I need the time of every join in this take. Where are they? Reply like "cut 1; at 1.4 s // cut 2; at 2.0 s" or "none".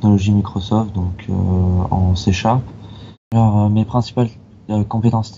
cut 1; at 3.3 s